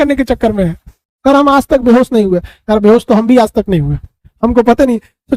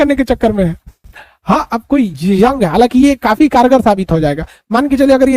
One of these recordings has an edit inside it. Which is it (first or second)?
first